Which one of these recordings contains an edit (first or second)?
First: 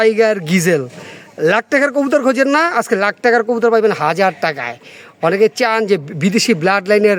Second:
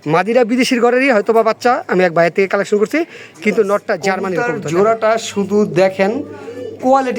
second